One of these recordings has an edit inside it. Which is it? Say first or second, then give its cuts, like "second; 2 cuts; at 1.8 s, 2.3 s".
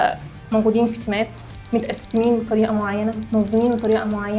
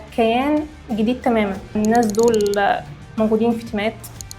second; 1 cut; at 1.8 s